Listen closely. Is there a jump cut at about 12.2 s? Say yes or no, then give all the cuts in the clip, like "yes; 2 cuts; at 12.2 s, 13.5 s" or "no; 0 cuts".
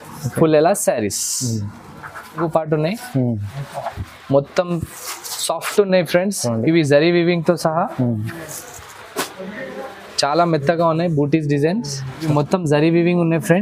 yes; 2 cuts; at 2.4 s, 12.2 s